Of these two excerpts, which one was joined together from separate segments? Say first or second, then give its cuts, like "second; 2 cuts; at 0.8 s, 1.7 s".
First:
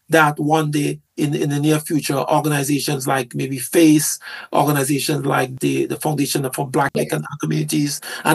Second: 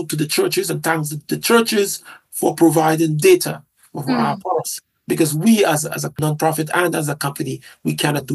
first; 3 cuts; at 1.0 s, 5.5 s, 6.9 s